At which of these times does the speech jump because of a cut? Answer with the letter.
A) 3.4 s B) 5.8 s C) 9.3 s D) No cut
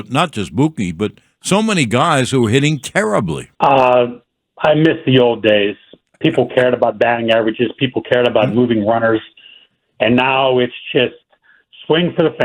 A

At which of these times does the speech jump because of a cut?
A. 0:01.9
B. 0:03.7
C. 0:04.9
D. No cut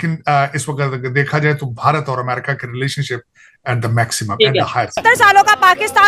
C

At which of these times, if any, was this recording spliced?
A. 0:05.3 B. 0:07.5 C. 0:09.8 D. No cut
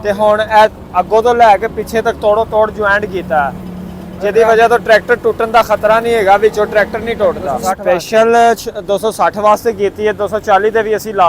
B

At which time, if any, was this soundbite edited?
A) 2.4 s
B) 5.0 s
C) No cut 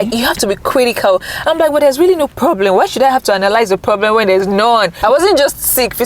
B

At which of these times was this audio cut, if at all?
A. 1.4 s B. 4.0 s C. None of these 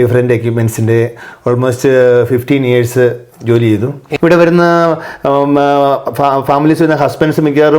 B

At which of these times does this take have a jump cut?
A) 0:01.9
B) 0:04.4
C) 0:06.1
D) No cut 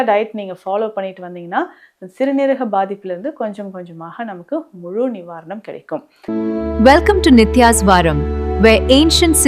C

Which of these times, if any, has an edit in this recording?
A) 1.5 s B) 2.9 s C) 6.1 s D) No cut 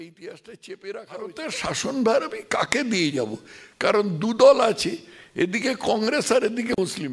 A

